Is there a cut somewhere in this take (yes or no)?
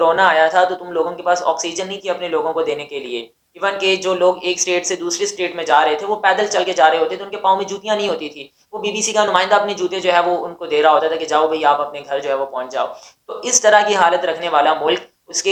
no